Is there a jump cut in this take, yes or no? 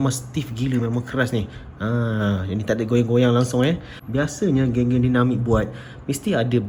no